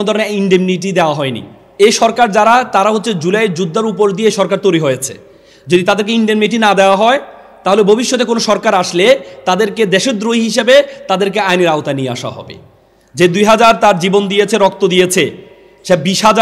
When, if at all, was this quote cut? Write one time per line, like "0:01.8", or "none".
0:01.6